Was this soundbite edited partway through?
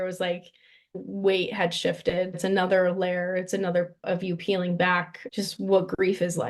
yes; 3 cuts; at 0.9 s, 4.0 s, 5.2 s

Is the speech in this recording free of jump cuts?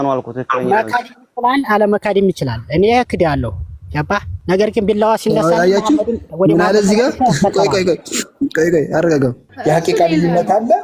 no; 2 cuts; at 4.3 s, 9.5 s

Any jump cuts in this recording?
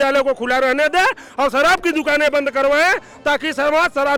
no; 0 cuts

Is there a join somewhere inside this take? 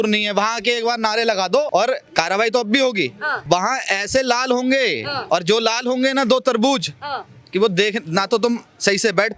yes; 3 cuts; at 1.7 s, 3.3 s, 5.1 s

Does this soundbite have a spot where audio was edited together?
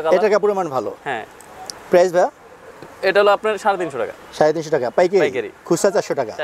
no; 0 cuts

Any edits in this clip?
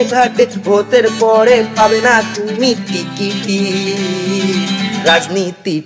no; 0 cuts

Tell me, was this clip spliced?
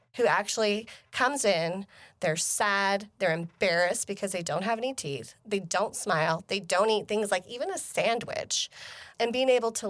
no; 0 cuts

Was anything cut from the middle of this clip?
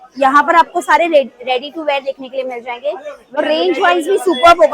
yes; 1 cut; at 3.4 s

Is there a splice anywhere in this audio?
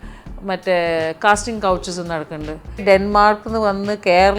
yes; 1 cut; at 2.8 s

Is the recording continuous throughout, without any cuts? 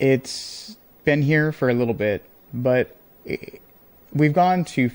yes; 0 cuts

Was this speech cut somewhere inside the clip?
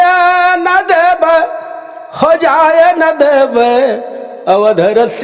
no; 0 cuts

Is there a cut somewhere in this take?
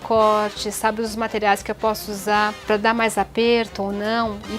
yes; 1 cut; at 2.6 s

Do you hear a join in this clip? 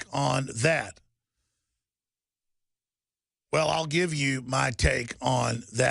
yes; 1 cut; at 4.9 s

